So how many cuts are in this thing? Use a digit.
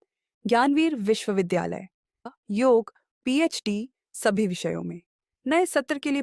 1